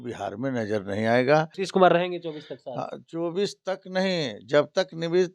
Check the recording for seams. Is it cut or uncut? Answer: cut